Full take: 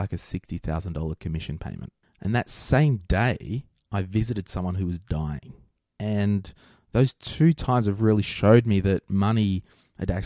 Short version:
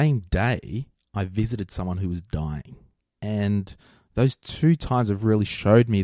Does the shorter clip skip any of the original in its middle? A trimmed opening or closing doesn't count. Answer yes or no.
no